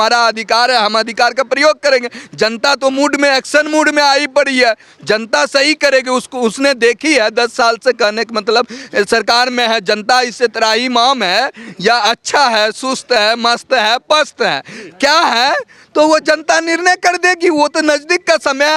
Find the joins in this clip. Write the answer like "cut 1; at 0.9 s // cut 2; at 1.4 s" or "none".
none